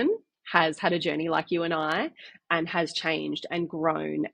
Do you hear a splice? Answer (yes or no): no